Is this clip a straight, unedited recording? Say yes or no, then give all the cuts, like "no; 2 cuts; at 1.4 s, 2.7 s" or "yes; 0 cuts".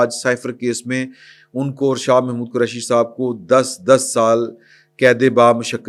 yes; 0 cuts